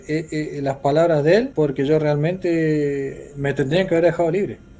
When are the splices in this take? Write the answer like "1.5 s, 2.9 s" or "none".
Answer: 1.5 s